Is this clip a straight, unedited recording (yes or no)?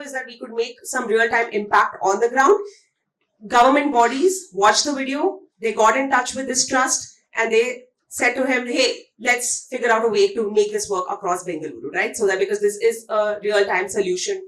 yes